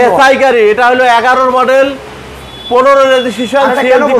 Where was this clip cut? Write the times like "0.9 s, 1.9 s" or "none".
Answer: none